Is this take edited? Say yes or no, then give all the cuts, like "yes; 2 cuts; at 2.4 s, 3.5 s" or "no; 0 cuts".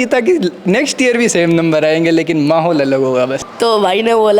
yes; 1 cut; at 3.4 s